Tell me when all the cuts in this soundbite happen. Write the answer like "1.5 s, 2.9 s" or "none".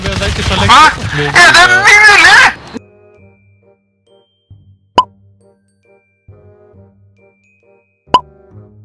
none